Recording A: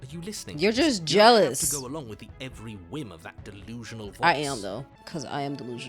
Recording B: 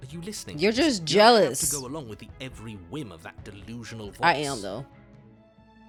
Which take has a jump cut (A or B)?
A